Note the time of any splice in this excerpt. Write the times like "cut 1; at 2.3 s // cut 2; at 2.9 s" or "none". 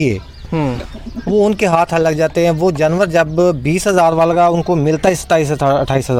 none